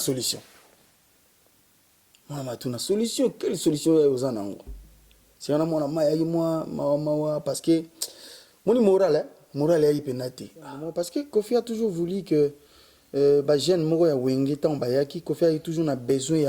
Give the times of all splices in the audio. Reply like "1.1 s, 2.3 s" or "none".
10.8 s